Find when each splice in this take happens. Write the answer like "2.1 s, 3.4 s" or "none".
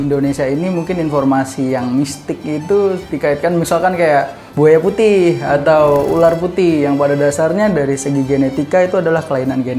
4.4 s